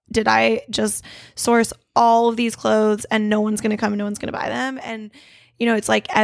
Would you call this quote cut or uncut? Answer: uncut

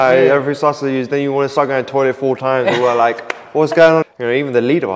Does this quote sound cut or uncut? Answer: cut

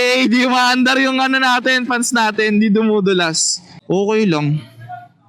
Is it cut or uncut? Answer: cut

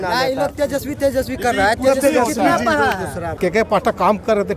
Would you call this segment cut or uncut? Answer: cut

